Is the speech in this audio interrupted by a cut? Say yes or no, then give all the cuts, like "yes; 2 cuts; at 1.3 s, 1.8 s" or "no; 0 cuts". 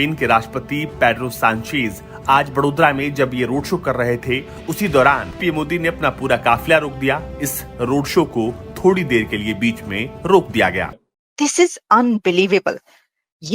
yes; 2 cuts; at 5.4 s, 10.9 s